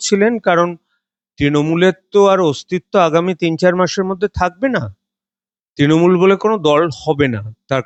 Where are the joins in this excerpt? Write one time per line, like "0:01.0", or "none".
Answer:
none